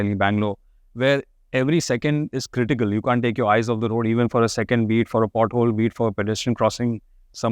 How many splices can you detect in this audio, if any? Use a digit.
0